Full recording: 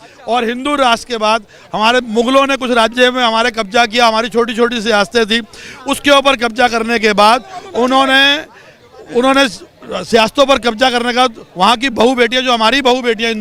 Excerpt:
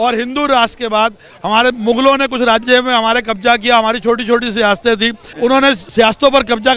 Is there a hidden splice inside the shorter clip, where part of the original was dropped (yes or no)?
yes